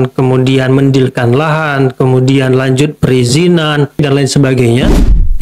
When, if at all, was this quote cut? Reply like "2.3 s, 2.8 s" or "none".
4.0 s